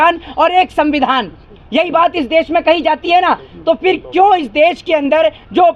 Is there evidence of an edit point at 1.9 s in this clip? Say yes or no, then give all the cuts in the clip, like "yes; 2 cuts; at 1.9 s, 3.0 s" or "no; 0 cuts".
no; 0 cuts